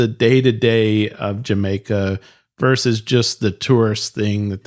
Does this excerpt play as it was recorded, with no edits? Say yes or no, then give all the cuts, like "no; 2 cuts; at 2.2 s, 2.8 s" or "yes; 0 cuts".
yes; 0 cuts